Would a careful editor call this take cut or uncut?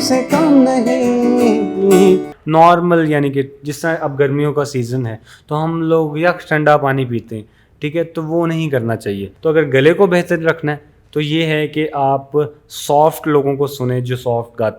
cut